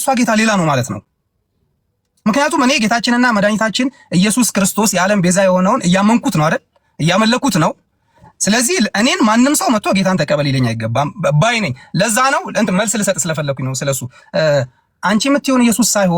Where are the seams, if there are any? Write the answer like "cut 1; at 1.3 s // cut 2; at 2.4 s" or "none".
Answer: none

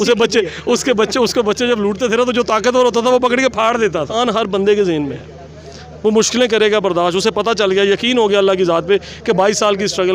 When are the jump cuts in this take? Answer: cut 1; at 4.1 s

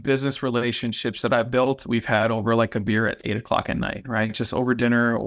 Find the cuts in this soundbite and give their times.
none

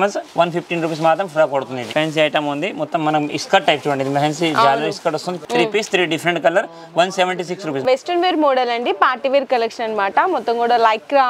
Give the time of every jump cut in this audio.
cut 1; at 1.9 s // cut 2; at 5.4 s // cut 3; at 7.8 s

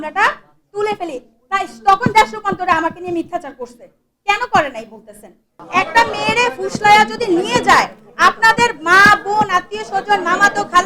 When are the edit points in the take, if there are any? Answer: cut 1; at 5.5 s

